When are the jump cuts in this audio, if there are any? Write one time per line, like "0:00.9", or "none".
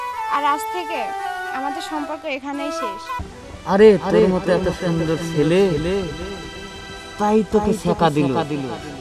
0:03.2